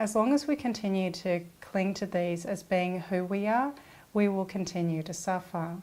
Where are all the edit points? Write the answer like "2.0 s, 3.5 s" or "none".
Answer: none